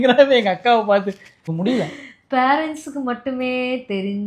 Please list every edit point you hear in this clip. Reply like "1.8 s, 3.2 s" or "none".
1.4 s

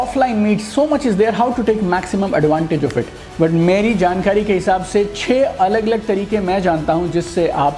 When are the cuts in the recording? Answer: 3.2 s

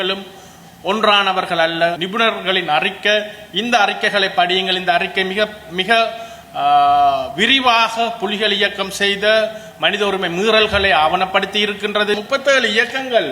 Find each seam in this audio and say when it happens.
2.0 s, 12.1 s

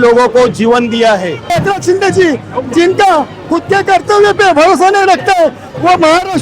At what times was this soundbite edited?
1.4 s

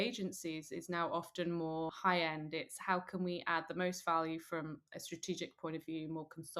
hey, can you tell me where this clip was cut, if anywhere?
1.9 s

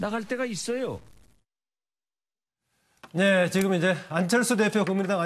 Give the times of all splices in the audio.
1.9 s

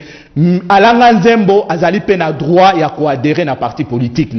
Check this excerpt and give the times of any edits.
none

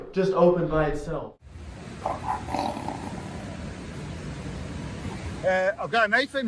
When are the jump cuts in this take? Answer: 1.1 s, 5.0 s

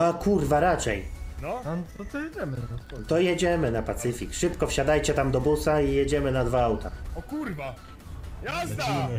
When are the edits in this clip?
7.0 s

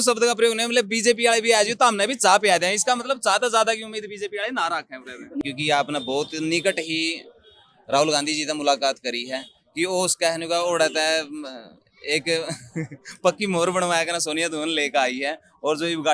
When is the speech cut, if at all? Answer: 5.4 s

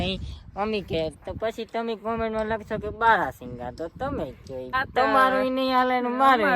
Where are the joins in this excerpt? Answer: 4.7 s

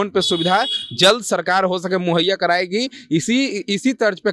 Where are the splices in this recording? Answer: none

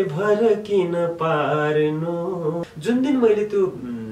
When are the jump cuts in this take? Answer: 2.7 s

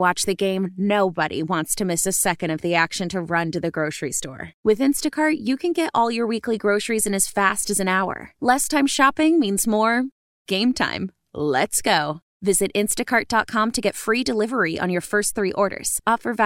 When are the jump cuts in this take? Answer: none

